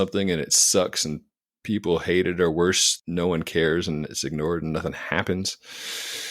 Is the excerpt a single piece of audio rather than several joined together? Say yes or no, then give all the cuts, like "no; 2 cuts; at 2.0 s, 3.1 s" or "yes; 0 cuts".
no; 1 cut; at 2.9 s